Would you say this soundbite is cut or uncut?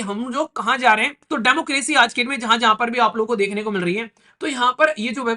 cut